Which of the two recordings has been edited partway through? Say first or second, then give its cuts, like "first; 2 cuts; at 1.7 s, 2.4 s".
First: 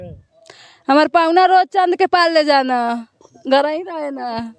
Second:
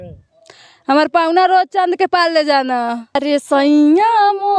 second; 1 cut; at 3.2 s